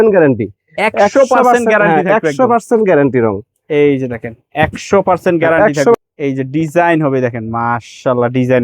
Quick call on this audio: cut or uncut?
cut